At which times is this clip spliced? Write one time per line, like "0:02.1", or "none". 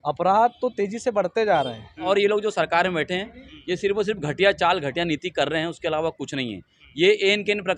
0:02.0